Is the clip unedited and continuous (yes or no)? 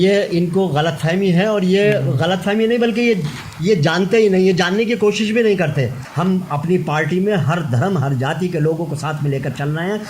no